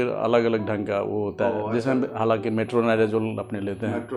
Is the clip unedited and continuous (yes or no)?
yes